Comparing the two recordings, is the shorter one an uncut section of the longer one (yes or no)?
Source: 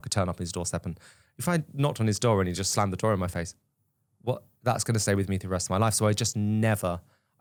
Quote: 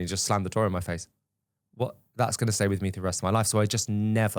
yes